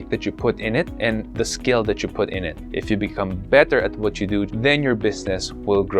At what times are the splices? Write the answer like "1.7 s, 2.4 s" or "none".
4.5 s